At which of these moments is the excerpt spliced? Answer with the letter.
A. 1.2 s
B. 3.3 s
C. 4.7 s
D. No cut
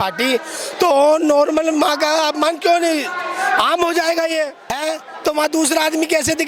C